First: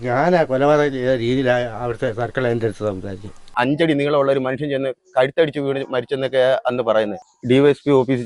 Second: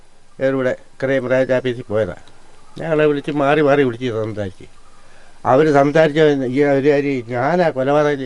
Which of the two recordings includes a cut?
first; 2 cuts; at 3.4 s, 7.3 s

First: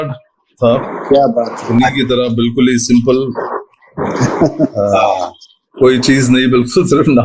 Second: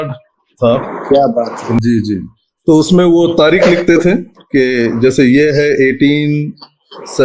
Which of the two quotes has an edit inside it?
second; 1 cut; at 1.8 s

